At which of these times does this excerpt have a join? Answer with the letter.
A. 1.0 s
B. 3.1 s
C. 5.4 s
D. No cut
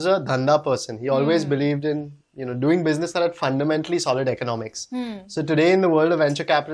D